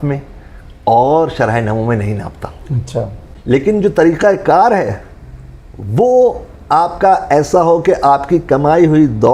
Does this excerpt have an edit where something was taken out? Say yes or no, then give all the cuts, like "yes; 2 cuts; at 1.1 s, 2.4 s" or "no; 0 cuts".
yes; 1 cut; at 3.3 s